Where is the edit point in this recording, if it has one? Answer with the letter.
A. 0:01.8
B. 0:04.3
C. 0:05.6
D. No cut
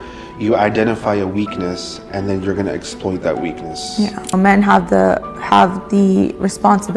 B